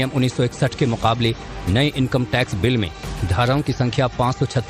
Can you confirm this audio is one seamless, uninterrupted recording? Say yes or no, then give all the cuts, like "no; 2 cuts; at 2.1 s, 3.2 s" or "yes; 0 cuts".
yes; 0 cuts